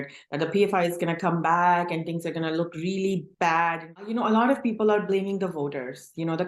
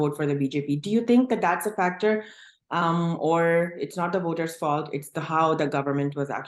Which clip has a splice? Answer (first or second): first